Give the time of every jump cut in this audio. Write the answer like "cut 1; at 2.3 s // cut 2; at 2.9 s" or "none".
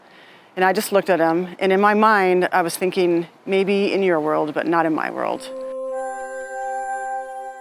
cut 1; at 5.7 s